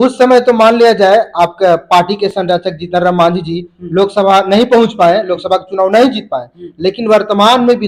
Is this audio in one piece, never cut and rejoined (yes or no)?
yes